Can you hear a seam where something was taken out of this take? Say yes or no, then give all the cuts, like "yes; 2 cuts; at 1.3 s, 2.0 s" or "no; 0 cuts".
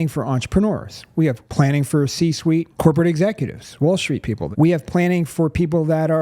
yes; 3 cuts; at 1.4 s, 2.7 s, 4.4 s